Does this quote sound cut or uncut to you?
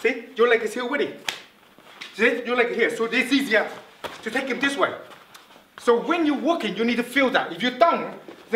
uncut